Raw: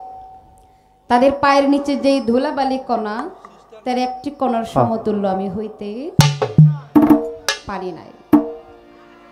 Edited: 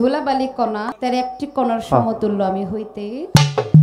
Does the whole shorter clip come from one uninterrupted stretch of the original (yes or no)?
no